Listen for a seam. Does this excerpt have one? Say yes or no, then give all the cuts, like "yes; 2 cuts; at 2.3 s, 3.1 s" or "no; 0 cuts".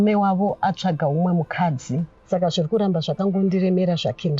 yes; 1 cut; at 2.1 s